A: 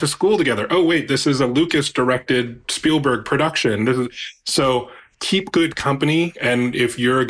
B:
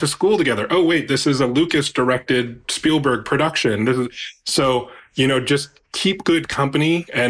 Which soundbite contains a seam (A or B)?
A